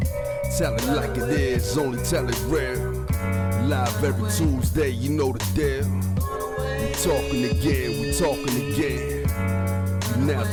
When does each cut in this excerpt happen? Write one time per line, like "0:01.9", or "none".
none